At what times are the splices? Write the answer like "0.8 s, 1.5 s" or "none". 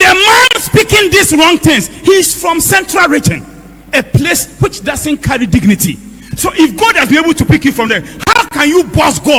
none